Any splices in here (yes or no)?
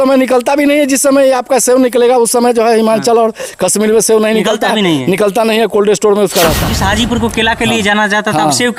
yes